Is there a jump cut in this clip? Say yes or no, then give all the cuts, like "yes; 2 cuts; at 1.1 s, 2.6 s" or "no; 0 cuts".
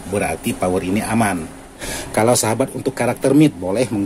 yes; 1 cut; at 1.9 s